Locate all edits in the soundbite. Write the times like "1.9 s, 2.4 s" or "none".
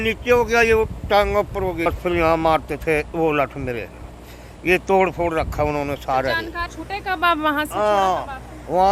1.9 s, 6.7 s